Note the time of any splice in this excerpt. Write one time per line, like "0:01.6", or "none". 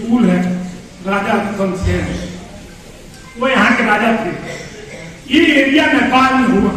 none

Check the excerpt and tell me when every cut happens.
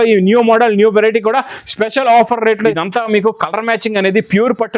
0:02.8

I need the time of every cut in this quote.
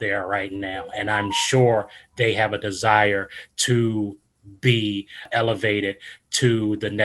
0:05.2

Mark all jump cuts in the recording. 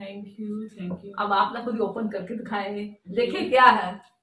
none

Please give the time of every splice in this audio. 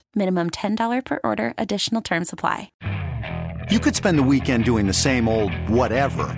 0:02.8

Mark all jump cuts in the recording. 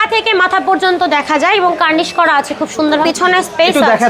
0:03.0

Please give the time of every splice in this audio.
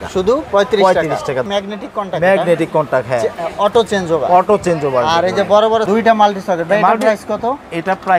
0:01.4
0:05.8

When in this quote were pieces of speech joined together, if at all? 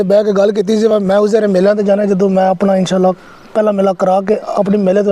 none

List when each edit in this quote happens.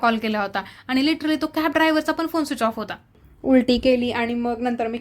0:03.2

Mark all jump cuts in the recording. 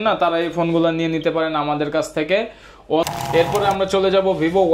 0:03.1

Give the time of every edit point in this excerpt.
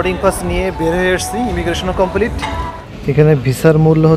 0:02.8

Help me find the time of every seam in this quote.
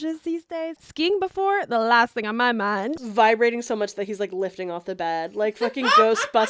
0:00.8
0:02.9

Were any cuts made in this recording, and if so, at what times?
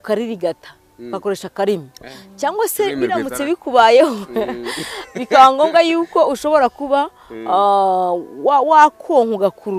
none

